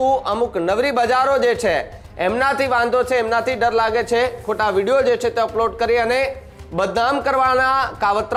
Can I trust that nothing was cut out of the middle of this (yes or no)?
yes